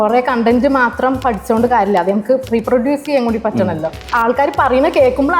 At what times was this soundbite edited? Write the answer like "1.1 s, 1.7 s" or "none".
4.0 s